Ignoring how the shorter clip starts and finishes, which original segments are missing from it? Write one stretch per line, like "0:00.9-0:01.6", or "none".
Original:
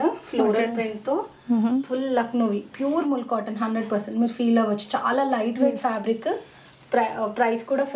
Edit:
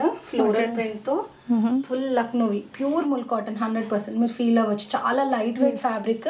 none

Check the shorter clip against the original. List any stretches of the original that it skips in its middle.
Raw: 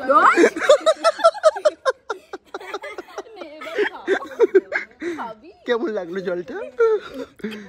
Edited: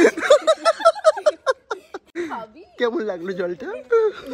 0:02.4-0:04.9

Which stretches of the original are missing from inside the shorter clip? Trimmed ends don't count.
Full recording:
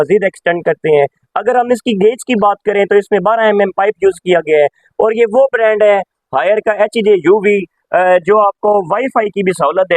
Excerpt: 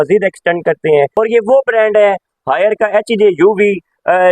0:01.1-0:05.0

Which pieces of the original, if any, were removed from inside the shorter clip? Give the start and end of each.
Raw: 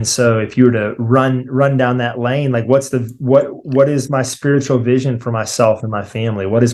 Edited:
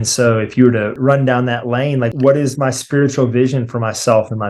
0:00.9-0:01.5
0:02.6-0:03.6

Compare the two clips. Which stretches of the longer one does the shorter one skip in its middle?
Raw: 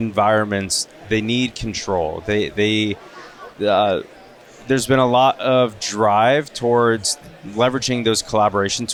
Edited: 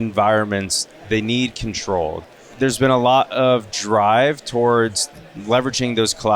0:02.2-0:04.3

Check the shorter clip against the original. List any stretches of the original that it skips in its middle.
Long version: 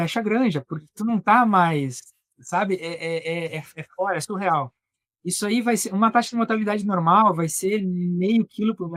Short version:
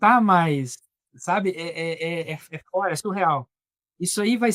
none

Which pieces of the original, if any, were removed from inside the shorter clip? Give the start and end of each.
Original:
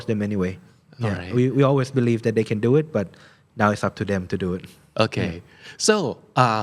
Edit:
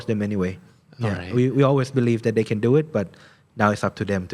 none

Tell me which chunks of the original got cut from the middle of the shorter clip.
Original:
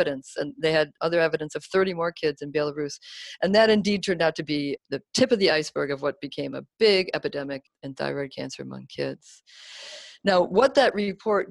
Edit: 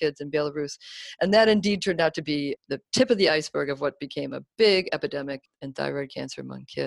none

